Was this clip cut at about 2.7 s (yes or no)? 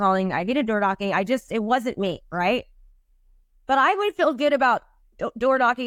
no